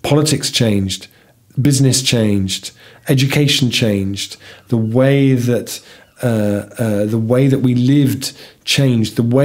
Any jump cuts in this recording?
no; 0 cuts

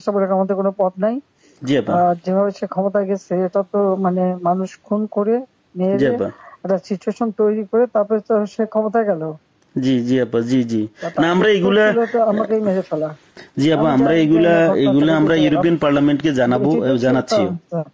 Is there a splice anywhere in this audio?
no; 0 cuts

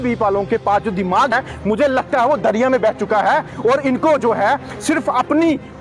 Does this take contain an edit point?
yes; 1 cut; at 1.3 s

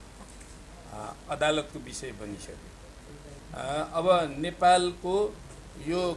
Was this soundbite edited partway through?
yes; 1 cut; at 3.4 s

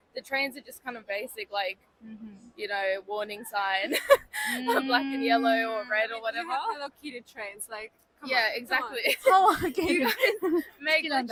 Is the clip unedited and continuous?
yes; 0 cuts

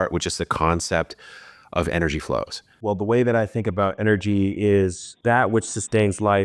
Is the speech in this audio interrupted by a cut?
no; 0 cuts

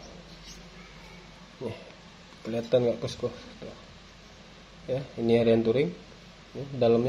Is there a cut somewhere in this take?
no; 0 cuts

